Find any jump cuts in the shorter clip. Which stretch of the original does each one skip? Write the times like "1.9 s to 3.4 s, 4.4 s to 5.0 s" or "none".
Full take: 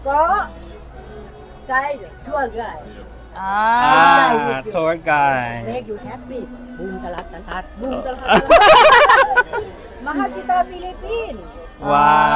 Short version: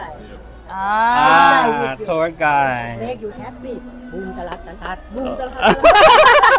none